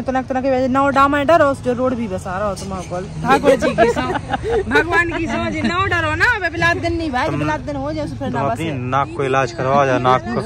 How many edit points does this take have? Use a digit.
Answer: 0